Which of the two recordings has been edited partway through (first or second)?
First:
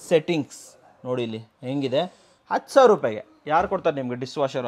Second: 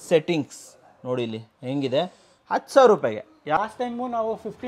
second